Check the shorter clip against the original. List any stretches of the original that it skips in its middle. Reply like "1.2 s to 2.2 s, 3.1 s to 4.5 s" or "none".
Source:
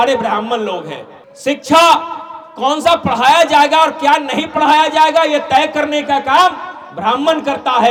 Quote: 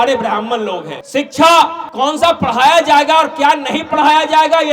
0.9 s to 1.3 s, 2.1 s to 2.5 s